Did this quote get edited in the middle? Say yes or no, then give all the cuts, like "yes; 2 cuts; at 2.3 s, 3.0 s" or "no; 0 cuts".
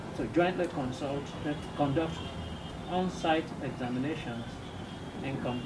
no; 0 cuts